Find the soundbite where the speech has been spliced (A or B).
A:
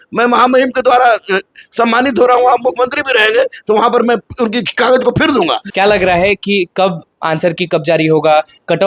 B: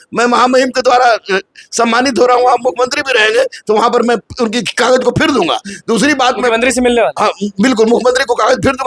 A